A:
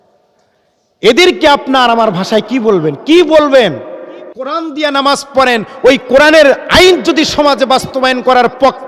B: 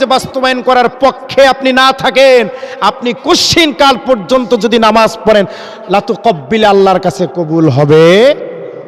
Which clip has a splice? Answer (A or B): A